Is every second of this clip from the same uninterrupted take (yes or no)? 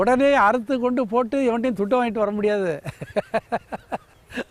yes